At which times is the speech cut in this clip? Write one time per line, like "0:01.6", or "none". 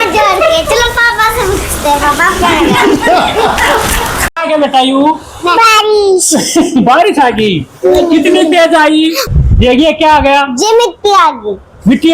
0:04.2
0:09.2